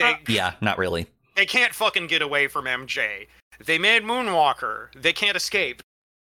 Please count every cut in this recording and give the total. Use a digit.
1